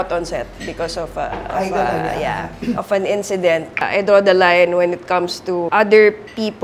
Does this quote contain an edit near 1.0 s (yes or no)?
no